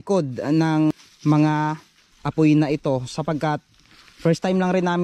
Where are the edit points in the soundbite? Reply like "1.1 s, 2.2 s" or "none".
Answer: 0.9 s

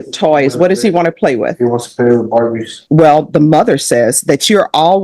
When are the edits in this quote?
2.7 s

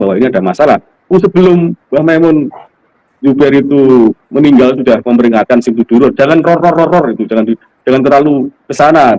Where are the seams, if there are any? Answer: none

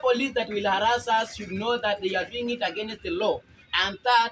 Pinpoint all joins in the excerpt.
none

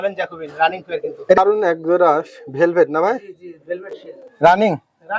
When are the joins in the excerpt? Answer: 1.4 s

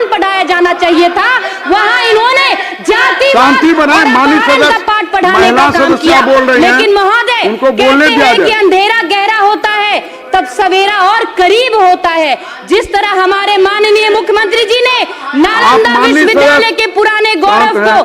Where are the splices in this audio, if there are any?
none

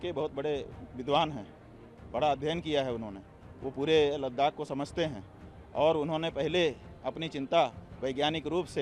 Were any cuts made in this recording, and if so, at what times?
none

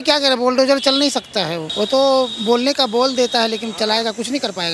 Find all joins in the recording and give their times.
1.6 s

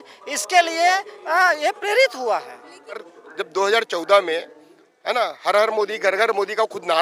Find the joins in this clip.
3.2 s

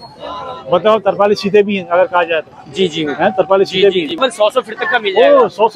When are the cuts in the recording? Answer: 4.1 s

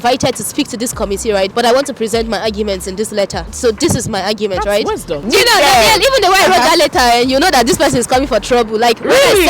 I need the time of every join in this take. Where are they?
5.2 s

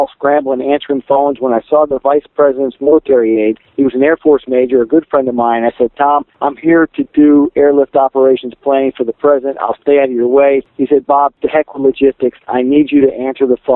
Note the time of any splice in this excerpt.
3.6 s, 6.3 s, 11.1 s

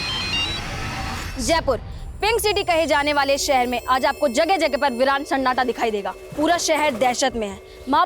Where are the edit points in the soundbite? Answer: 1.3 s, 6.2 s

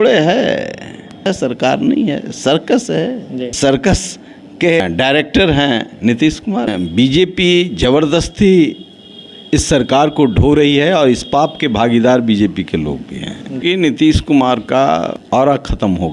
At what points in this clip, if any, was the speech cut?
1.3 s, 3.5 s, 4.8 s, 6.7 s, 13.6 s, 15.2 s

